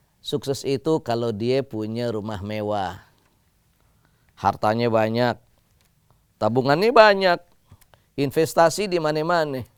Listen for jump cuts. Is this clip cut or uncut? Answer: uncut